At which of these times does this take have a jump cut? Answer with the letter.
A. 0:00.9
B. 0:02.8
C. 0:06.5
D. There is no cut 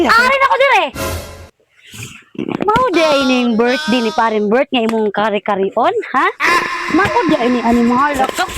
A